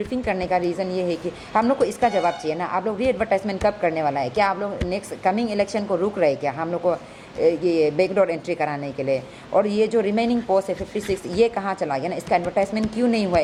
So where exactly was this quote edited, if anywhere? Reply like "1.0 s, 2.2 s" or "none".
none